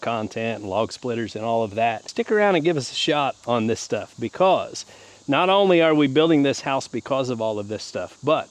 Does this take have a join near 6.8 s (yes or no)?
no